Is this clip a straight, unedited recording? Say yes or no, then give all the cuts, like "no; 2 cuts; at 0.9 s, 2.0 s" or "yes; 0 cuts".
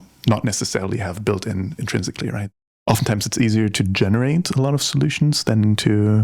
no; 1 cut; at 2.8 s